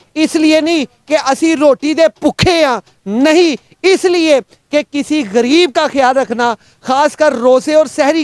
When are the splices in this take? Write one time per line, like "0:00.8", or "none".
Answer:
none